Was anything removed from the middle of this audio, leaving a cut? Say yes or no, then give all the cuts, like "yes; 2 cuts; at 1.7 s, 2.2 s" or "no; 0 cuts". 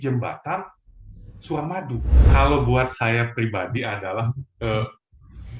yes; 1 cut; at 2.3 s